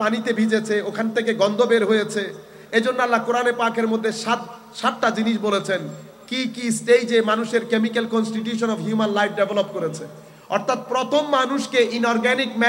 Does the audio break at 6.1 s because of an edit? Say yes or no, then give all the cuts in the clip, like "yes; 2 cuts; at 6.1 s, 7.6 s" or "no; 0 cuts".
no; 0 cuts